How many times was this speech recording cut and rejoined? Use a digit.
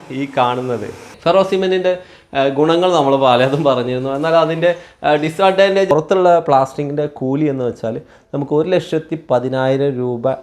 2